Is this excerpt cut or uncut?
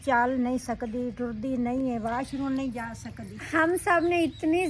uncut